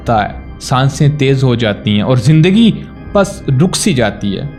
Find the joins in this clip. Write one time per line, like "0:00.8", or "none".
none